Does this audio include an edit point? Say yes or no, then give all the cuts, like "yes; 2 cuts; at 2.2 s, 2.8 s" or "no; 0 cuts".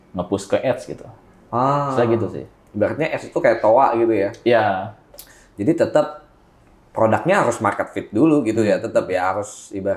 no; 0 cuts